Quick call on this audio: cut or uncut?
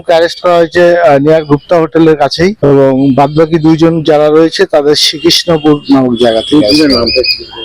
cut